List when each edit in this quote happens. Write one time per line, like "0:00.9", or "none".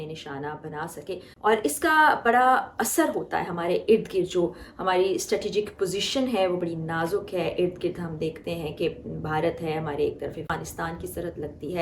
0:01.3
0:10.5